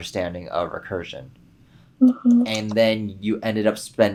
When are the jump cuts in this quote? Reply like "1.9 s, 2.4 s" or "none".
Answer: none